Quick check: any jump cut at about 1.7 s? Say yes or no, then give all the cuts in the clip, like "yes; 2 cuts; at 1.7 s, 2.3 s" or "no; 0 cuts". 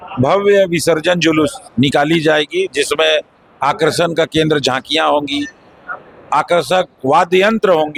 no; 0 cuts